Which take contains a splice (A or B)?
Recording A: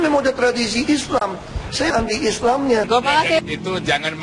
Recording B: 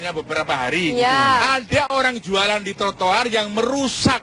A